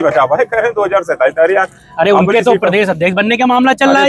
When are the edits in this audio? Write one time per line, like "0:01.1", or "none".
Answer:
none